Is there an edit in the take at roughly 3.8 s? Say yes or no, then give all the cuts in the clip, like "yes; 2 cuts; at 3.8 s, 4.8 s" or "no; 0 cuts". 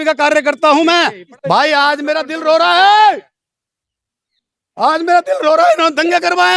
no; 1 cut; at 1.3 s